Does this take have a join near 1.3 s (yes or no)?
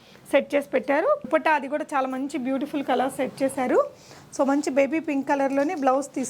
yes